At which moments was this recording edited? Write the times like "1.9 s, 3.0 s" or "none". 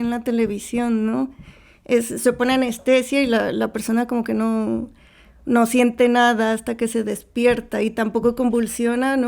none